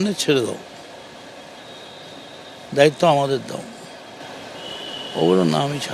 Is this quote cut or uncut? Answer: uncut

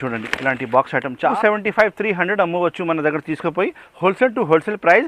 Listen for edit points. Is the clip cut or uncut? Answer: cut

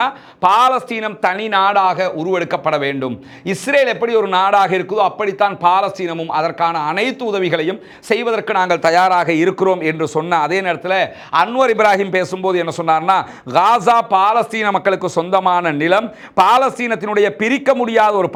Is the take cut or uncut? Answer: uncut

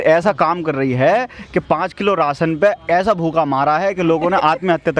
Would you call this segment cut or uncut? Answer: uncut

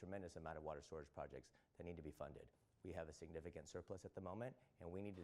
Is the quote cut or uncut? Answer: uncut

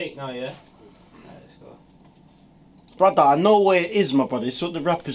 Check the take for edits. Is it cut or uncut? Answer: cut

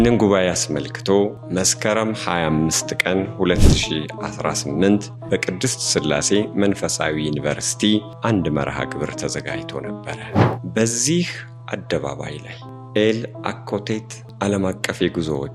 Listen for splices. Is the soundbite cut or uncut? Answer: cut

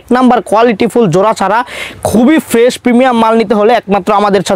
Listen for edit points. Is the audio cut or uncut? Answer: uncut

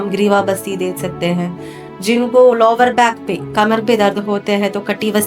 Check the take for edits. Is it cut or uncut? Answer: uncut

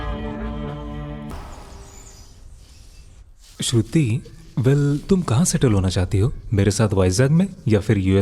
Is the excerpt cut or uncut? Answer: cut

